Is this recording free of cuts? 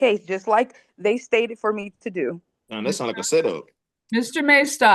yes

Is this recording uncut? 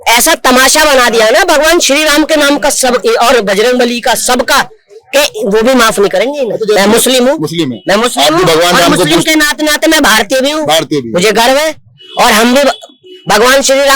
no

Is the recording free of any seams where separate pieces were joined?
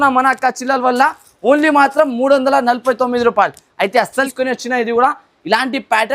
no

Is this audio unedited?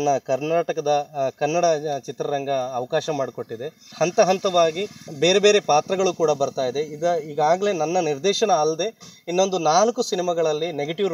no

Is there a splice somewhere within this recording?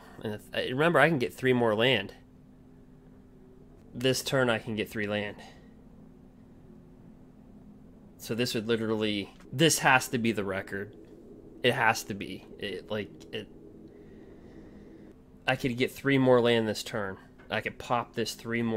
yes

